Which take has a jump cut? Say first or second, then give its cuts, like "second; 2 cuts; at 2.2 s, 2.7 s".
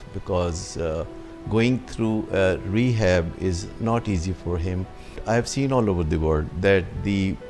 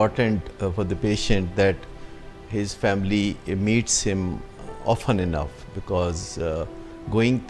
first; 1 cut; at 5.2 s